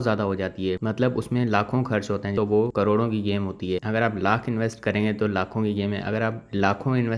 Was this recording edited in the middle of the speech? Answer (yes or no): yes